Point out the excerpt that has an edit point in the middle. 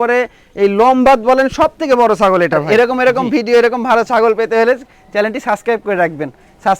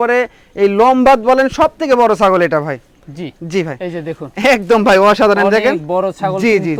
first; 1 cut; at 2.6 s

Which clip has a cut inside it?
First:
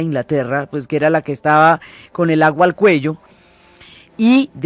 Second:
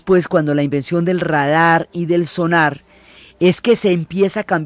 first; 1 cut; at 1.3 s

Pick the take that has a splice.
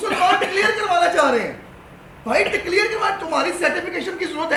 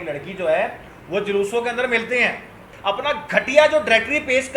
second; 1 cut; at 2.7 s

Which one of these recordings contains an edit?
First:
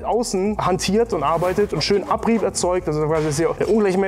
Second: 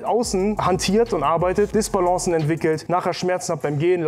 second; 1 cut; at 1.7 s

